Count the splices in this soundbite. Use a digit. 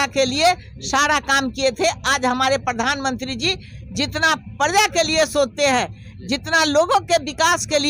0